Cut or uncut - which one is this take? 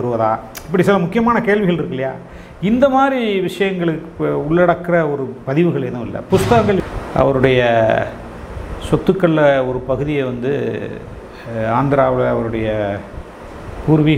cut